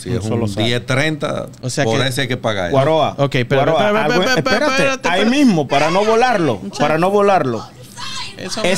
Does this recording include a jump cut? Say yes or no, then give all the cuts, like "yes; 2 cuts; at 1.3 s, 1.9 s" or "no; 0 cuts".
yes; 1 cut; at 1.6 s